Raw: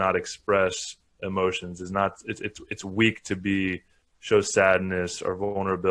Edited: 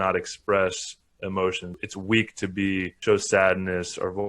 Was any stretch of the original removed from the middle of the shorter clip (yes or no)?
yes